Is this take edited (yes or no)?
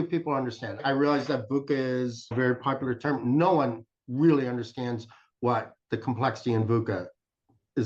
no